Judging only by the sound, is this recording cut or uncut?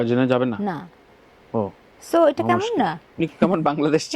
uncut